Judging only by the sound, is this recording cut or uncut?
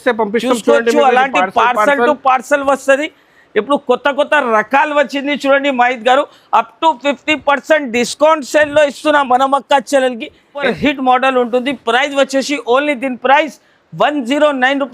cut